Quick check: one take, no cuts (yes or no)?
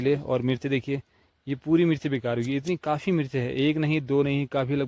yes